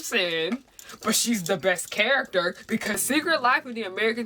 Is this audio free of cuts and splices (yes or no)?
no